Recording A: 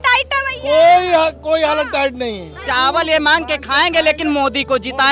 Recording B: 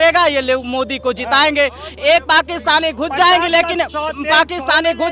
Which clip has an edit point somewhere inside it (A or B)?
A